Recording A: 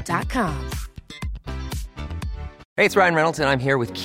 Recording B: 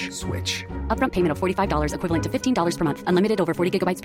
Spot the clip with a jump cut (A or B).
A